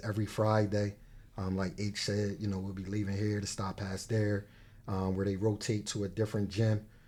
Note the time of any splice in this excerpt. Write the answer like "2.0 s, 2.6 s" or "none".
none